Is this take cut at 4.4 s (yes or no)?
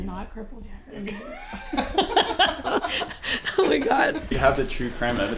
yes